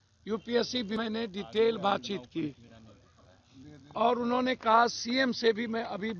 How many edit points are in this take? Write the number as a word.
one